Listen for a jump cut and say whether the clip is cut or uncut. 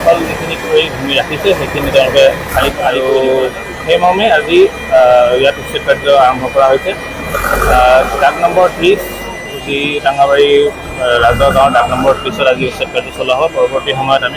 cut